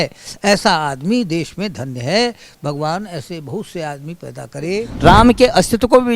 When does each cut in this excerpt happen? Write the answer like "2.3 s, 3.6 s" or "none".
4.9 s